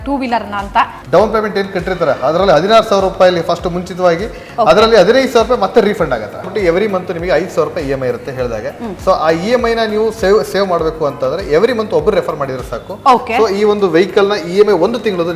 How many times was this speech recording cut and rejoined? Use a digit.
2